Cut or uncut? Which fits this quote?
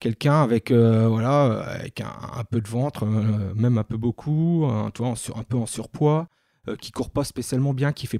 uncut